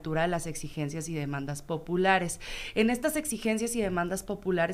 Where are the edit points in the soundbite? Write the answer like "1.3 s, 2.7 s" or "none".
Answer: none